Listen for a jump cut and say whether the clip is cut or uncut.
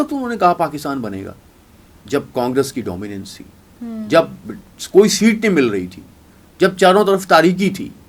uncut